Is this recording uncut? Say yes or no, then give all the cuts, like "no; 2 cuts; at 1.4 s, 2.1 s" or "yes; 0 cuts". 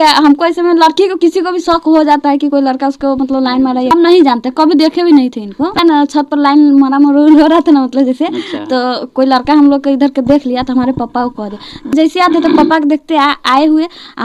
no; 3 cuts; at 3.5 s, 5.7 s, 11.9 s